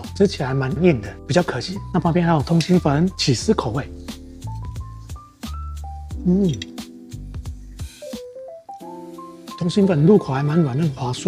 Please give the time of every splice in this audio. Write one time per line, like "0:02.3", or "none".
none